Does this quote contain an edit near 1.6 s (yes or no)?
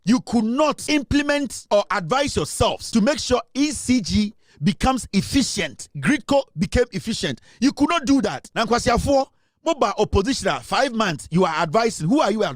yes